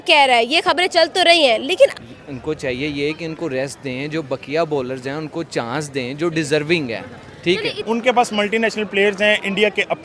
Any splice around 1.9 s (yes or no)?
yes